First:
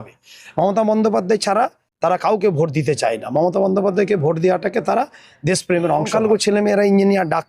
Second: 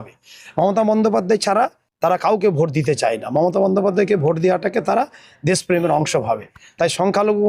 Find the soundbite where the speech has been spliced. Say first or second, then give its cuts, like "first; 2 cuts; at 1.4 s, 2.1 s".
first; 1 cut; at 6.1 s